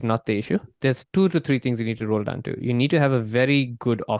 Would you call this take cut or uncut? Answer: cut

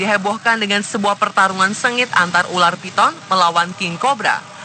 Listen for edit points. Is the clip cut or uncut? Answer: cut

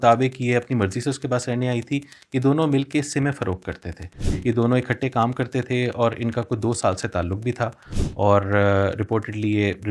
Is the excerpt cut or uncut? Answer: uncut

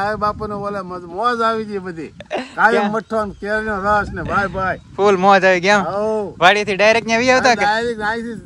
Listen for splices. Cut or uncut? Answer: uncut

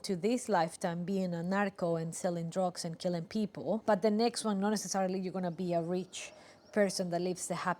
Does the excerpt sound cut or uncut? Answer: cut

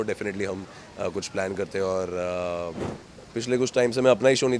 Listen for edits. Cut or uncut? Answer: cut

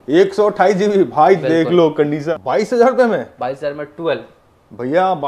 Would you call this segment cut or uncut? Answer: cut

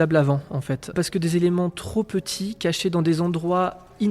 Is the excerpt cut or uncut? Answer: cut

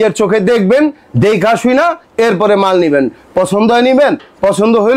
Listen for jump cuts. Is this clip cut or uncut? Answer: uncut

